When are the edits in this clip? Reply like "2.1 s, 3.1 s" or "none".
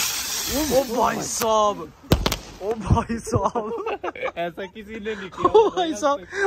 none